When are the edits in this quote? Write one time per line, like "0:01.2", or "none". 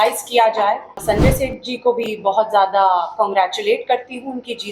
0:01.0

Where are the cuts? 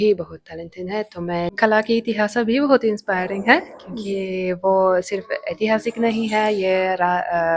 0:01.5

